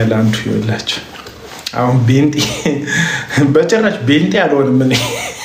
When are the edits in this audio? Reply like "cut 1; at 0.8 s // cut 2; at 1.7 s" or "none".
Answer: none